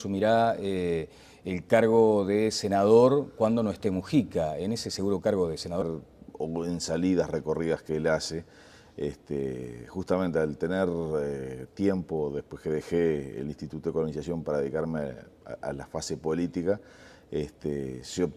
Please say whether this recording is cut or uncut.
uncut